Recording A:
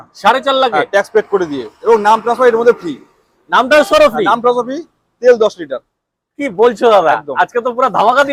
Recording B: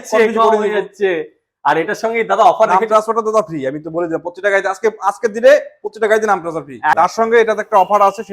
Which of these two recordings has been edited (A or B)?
B